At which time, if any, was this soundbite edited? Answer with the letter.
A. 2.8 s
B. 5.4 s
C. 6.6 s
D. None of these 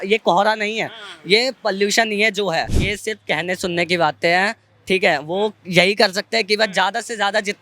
A